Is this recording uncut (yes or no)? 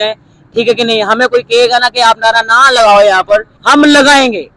no